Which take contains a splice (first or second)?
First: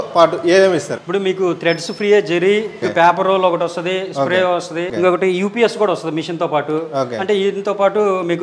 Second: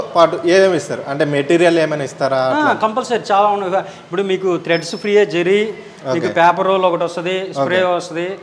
first